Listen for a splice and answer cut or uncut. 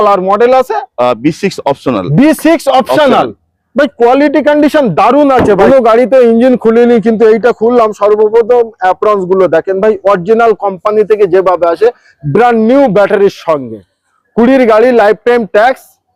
cut